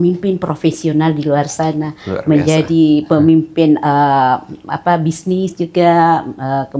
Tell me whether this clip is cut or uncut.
uncut